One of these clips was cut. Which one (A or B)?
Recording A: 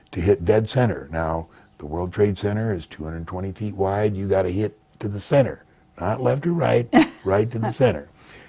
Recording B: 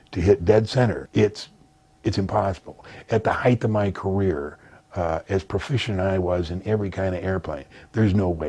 B